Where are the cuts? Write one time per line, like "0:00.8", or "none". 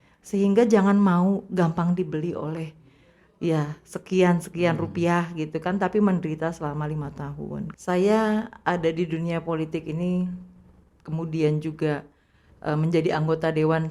0:07.7